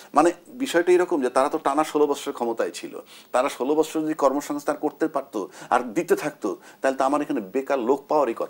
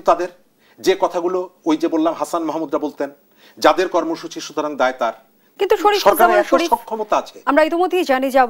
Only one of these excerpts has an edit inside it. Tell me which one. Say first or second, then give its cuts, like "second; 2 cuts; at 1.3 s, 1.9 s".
second; 1 cut; at 5.4 s